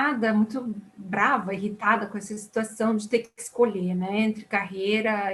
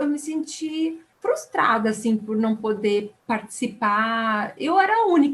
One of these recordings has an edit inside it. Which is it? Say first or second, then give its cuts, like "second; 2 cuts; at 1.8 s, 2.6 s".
second; 2 cuts; at 1.1 s, 3.1 s